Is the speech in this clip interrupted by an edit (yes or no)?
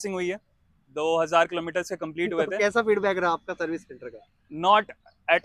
no